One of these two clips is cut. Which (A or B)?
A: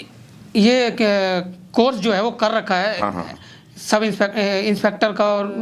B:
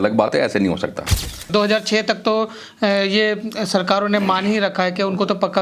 B